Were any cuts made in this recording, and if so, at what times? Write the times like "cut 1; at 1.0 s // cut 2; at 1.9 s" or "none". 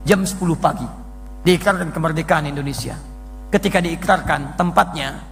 none